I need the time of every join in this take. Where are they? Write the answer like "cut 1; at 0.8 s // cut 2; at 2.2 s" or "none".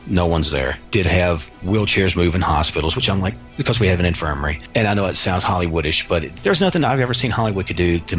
cut 1; at 0.8 s // cut 2; at 1.6 s // cut 3; at 4.5 s // cut 4; at 6.3 s

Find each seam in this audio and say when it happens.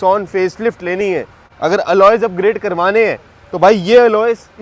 cut 1; at 1.5 s

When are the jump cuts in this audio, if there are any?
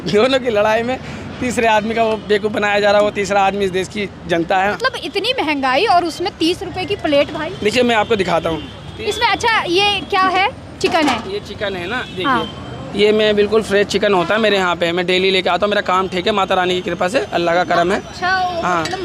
cut 1; at 4.8 s

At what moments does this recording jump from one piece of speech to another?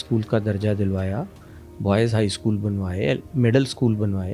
none

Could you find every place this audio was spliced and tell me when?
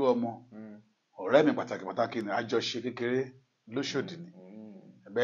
none

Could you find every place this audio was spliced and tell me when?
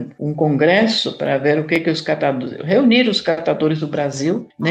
none

